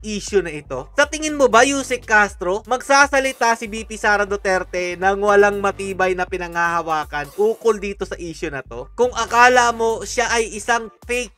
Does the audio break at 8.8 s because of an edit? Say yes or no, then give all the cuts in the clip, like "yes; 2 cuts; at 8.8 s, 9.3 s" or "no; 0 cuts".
no; 0 cuts